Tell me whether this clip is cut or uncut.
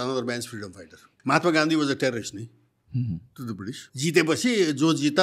cut